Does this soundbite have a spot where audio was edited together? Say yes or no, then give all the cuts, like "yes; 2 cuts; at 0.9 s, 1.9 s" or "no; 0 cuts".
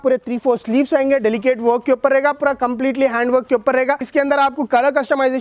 yes; 1 cut; at 4.1 s